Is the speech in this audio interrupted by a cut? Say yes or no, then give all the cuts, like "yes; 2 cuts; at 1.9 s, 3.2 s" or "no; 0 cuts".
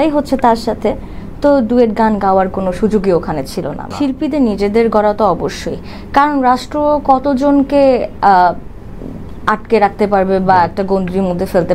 yes; 1 cut; at 3.9 s